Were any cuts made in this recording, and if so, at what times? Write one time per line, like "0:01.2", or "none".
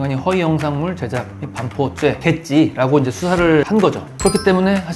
0:02.2
0:03.7